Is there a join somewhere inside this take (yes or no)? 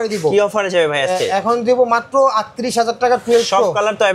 no